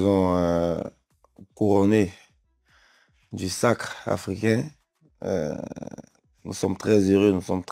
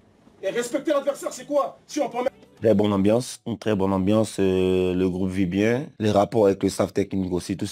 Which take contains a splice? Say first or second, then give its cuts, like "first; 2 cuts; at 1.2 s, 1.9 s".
second; 1 cut; at 2.4 s